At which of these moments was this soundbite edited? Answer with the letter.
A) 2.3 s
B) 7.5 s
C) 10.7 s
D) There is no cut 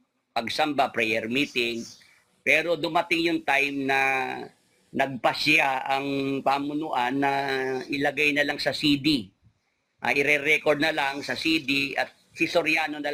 D